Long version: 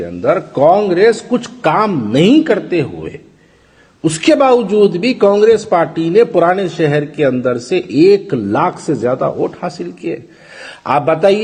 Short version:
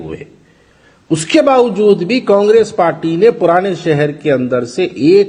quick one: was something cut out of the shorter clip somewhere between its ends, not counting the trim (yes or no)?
no